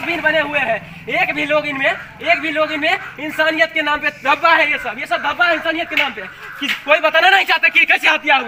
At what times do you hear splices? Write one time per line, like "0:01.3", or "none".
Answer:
none